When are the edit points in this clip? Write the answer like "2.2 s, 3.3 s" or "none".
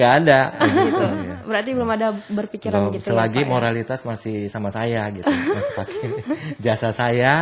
1.2 s